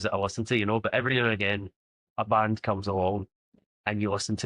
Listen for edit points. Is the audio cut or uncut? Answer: cut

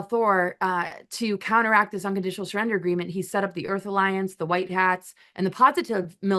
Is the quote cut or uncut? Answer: uncut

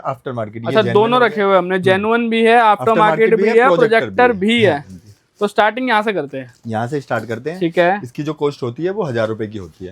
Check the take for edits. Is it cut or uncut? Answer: uncut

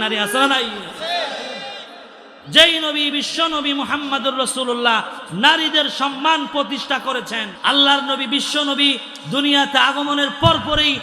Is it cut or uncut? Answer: cut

